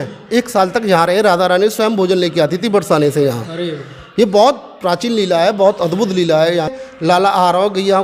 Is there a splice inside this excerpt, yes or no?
yes